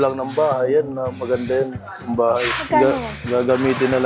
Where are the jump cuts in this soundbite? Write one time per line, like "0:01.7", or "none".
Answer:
none